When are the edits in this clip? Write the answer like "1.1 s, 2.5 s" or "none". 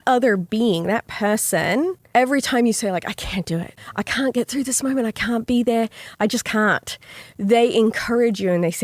2.0 s, 3.8 s, 6.0 s